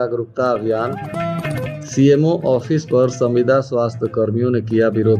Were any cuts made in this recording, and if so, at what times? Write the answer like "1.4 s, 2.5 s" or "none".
none